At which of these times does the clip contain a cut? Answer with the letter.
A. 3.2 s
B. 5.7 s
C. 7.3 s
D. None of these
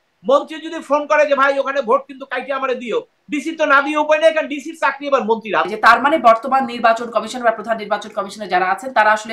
B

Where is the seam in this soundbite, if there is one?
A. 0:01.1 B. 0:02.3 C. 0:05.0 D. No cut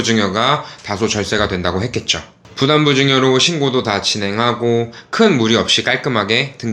B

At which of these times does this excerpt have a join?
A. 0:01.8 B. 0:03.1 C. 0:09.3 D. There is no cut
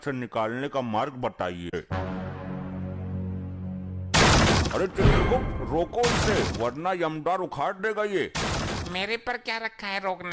A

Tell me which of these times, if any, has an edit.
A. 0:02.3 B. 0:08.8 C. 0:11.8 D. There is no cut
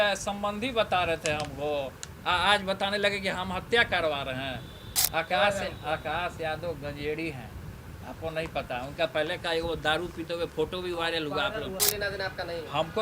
C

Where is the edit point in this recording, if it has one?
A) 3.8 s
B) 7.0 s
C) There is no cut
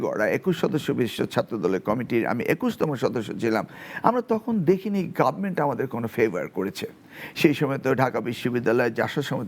C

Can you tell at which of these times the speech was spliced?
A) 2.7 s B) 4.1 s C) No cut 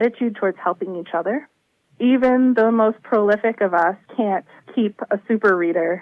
C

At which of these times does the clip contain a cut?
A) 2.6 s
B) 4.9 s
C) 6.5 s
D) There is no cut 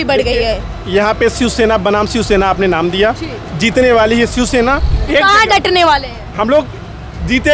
B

